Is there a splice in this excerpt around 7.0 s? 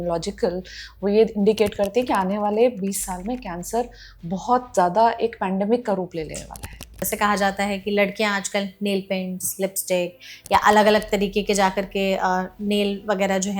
yes; 1 cut; at 7.0 s

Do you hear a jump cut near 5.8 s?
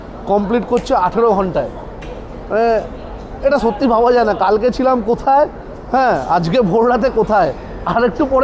no; 0 cuts

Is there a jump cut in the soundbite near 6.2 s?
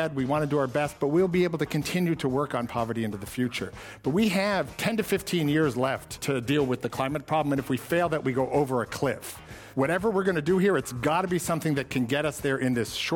yes; 3 cuts; at 4.7 s, 6.2 s, 9.6 s

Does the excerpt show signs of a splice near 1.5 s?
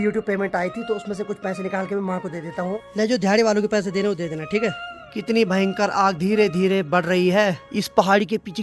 no; 3 cuts; at 2.8 s, 5.1 s, 7.7 s

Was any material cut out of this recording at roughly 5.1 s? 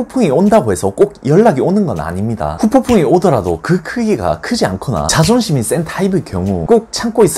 yes; 3 cuts; at 2.5 s, 5.1 s, 6.6 s

